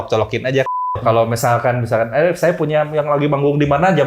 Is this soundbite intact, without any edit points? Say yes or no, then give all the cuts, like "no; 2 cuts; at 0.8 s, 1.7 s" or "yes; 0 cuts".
no; 1 cut; at 1.0 s